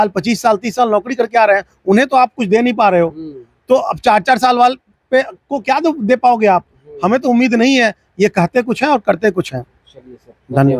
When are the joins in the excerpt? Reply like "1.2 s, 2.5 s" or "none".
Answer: none